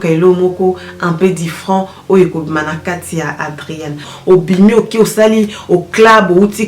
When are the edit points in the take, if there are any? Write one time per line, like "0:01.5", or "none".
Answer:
0:04.1